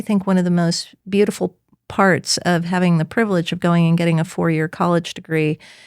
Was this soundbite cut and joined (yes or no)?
yes